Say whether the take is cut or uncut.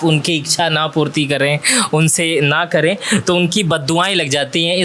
uncut